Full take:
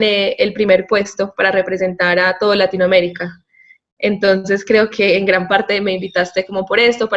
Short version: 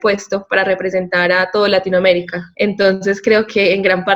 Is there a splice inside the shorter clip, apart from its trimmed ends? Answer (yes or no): yes